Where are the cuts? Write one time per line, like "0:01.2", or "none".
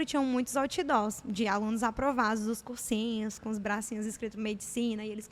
none